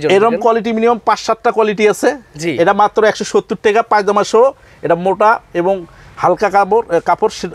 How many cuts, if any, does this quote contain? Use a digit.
0